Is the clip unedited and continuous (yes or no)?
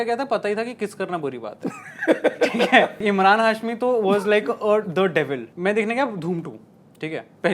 no